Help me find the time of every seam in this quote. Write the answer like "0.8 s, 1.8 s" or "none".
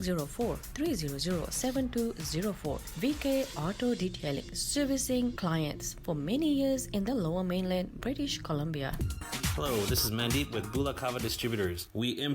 9.4 s